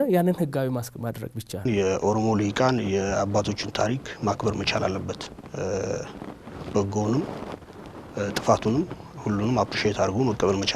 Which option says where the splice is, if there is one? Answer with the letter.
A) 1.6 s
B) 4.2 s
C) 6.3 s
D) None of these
A